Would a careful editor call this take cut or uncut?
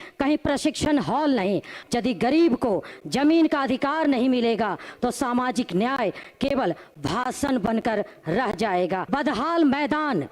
cut